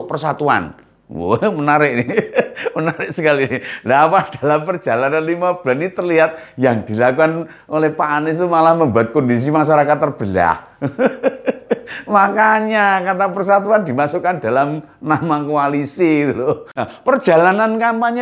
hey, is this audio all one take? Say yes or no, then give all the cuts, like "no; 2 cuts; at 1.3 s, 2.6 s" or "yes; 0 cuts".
no; 1 cut; at 16.7 s